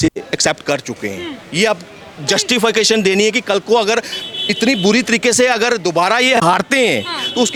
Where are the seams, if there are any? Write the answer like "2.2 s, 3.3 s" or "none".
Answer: none